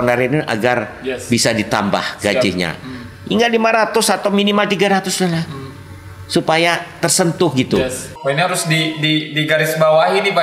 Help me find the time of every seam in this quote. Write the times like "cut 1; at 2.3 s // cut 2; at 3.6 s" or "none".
cut 1; at 8.1 s